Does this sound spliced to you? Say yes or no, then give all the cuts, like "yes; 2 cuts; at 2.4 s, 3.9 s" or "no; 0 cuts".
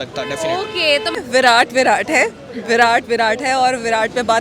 yes; 1 cut; at 1.2 s